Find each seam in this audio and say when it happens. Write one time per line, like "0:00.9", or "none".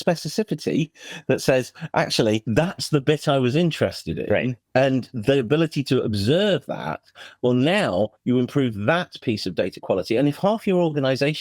0:02.5
0:04.6